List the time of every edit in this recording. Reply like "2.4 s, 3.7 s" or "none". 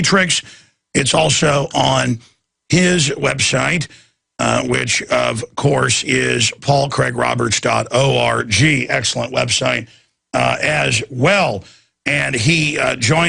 5.1 s